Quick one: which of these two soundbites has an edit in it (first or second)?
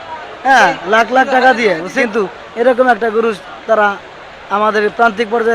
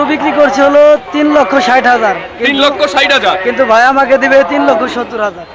first